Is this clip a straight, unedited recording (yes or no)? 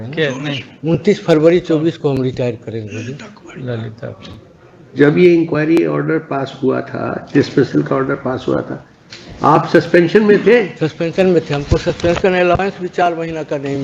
yes